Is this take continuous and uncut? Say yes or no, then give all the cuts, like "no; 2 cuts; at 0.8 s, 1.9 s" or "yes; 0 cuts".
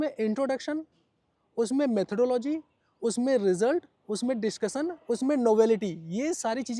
yes; 0 cuts